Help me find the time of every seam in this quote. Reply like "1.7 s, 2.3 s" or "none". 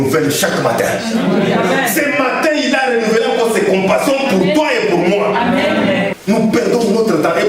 6.2 s